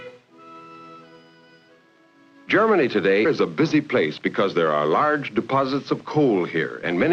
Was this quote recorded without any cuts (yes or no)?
yes